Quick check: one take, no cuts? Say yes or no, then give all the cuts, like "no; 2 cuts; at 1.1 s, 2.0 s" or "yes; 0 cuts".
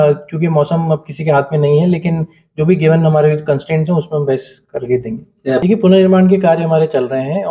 no; 1 cut; at 5.6 s